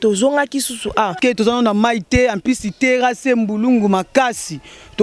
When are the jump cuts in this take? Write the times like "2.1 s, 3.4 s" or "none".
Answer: 1.2 s